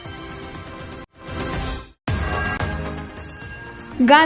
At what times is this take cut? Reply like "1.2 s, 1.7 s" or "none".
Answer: none